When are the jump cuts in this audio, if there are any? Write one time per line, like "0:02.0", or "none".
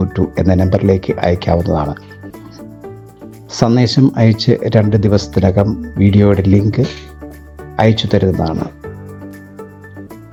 none